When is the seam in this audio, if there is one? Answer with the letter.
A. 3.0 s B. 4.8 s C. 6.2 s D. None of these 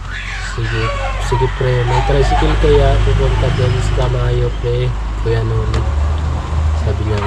D